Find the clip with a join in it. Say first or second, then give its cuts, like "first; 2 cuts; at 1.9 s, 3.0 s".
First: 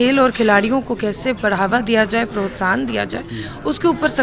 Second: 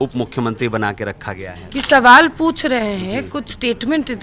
second; 1 cut; at 1.5 s